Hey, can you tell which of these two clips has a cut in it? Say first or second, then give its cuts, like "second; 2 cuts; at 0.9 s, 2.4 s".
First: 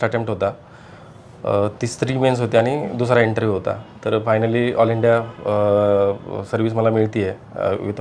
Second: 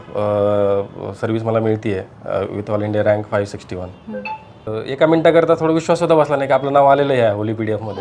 second; 1 cut; at 4.7 s